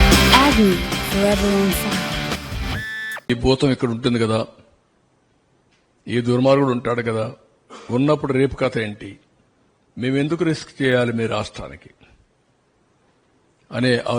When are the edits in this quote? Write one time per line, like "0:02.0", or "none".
0:03.2